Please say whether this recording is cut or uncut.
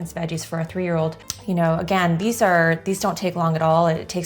cut